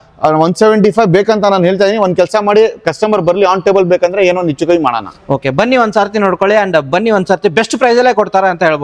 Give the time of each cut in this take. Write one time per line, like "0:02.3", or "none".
none